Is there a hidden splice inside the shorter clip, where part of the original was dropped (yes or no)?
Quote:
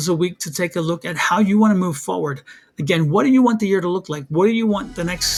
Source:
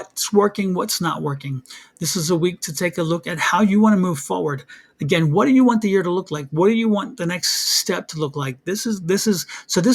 no